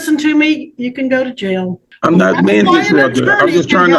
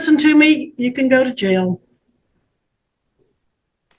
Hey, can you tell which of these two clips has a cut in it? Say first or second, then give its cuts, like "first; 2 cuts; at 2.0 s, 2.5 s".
first; 1 cut; at 1.8 s